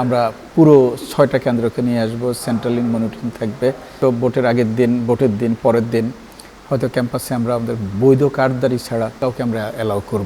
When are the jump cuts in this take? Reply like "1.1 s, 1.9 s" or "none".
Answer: 4.0 s, 9.2 s